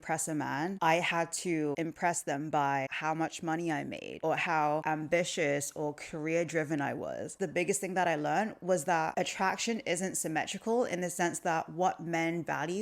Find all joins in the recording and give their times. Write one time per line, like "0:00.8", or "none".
0:00.8
0:01.7
0:02.9
0:04.1
0:04.8
0:07.4
0:09.1